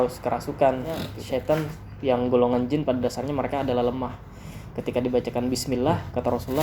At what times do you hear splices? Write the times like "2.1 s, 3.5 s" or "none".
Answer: 1.1 s